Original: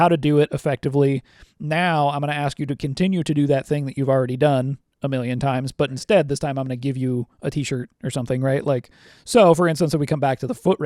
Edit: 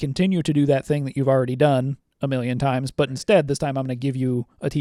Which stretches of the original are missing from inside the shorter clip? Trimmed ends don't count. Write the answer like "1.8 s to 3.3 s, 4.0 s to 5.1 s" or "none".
none